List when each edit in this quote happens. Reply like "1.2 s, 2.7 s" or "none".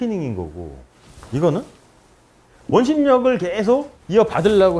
none

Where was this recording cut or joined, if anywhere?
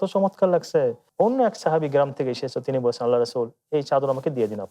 1.0 s

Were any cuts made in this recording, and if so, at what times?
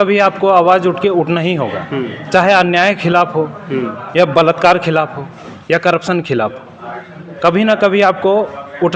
none

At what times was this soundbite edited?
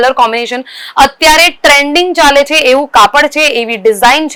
none

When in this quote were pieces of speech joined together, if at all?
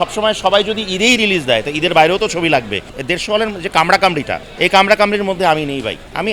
2.9 s, 4.4 s

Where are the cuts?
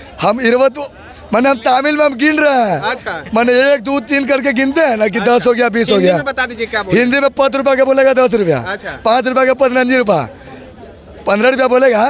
none

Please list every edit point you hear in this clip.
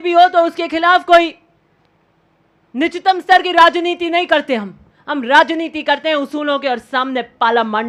none

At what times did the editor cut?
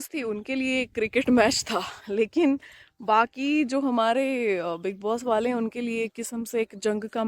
none

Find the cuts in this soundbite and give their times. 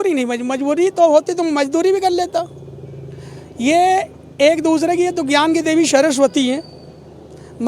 none

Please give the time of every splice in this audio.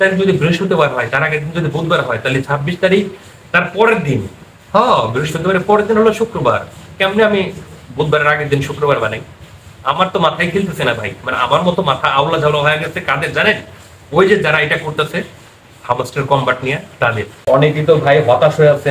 17.3 s

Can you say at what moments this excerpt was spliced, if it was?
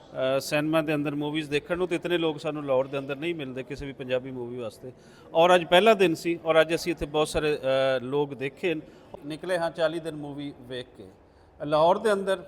9.1 s

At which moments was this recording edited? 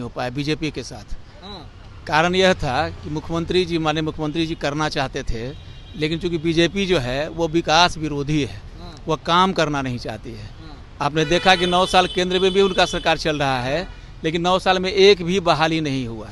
none

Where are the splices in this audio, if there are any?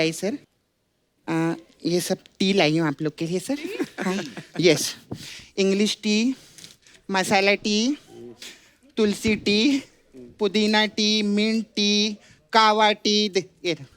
none

